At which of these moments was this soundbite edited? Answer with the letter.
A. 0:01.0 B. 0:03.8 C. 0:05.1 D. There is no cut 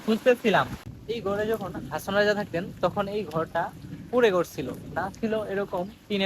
A